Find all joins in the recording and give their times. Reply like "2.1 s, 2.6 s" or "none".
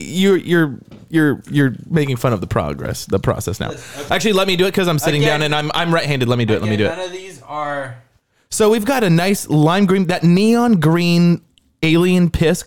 3.9 s